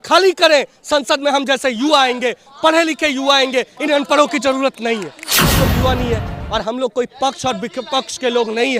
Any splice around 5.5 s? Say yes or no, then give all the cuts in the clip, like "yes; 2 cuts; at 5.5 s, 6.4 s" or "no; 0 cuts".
yes; 1 cut; at 5.5 s